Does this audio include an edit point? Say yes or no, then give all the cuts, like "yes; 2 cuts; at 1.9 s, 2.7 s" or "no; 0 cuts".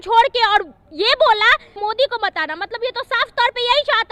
yes; 1 cut; at 1.8 s